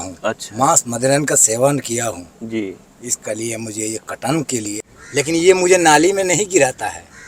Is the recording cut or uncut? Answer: cut